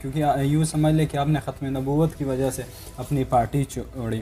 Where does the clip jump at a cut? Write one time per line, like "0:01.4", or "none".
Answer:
none